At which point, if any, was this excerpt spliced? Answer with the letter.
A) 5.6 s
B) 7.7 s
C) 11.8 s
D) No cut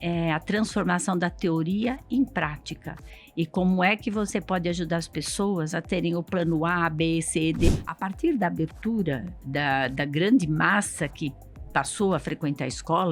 B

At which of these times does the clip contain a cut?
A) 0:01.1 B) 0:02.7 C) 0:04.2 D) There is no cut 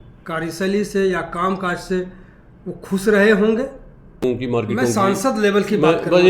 C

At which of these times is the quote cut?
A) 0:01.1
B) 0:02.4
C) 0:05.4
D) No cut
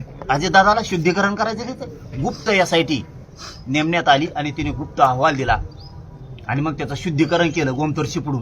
D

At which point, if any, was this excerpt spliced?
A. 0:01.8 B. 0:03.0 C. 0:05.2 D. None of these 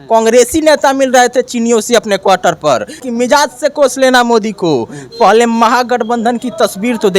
B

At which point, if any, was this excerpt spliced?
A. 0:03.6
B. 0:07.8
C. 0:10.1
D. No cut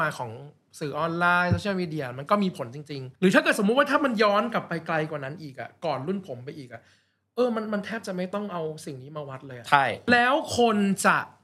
C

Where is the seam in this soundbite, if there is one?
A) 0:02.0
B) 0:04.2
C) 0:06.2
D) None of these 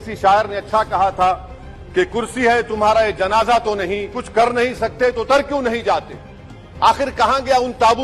B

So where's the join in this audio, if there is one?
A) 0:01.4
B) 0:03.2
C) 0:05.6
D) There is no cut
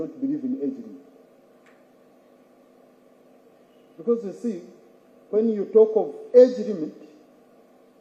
D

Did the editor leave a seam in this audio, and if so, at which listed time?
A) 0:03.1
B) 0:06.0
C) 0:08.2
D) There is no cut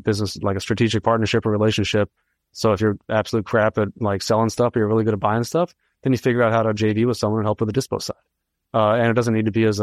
D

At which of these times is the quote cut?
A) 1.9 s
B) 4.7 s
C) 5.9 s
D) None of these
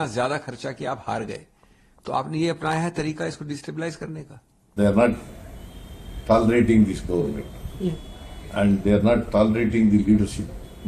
B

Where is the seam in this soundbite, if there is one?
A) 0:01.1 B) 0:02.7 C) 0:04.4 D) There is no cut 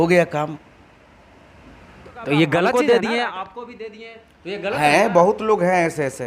B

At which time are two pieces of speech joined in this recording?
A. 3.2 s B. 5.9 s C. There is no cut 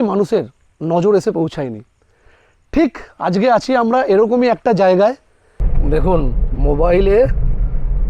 B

